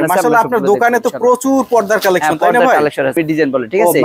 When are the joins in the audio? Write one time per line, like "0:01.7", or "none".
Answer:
0:03.1